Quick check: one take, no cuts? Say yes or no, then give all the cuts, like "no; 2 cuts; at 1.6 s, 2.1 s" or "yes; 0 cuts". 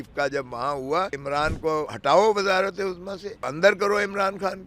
no; 2 cuts; at 1.6 s, 3.5 s